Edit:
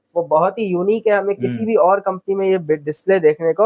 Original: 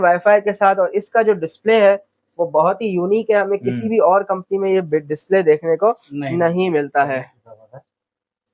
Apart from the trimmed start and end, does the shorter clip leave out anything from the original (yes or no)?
no